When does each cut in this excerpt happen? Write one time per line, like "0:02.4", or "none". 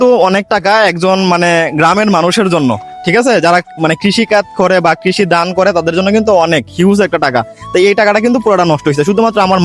none

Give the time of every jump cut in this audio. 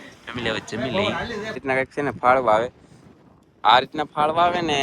0:01.6

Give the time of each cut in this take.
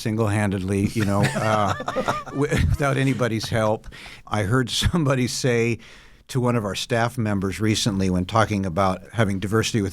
0:04.2
0:09.0

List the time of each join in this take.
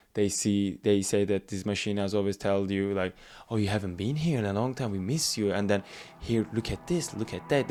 none

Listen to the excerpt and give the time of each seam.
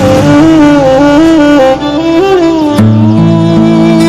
none

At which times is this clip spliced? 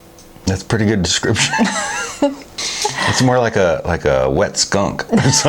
0:02.5

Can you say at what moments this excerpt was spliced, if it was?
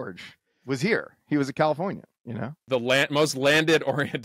0:02.6

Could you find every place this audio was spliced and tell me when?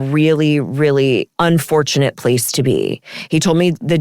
0:01.3

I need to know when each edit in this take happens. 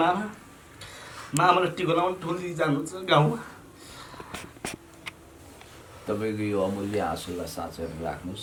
none

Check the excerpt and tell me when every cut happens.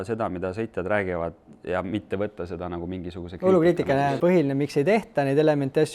0:04.1

